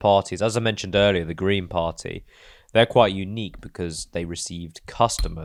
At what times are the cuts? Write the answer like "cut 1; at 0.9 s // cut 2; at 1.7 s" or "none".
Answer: none